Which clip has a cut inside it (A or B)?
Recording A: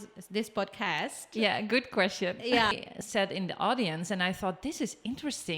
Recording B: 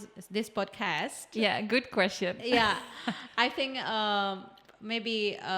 A